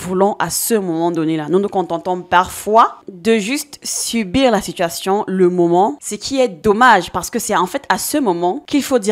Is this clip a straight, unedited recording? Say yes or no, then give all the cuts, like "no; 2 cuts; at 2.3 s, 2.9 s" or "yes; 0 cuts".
no; 2 cuts; at 3.1 s, 6.0 s